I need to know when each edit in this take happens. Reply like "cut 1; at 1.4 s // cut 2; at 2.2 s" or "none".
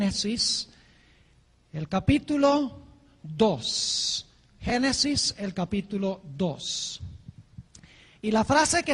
cut 1; at 7.8 s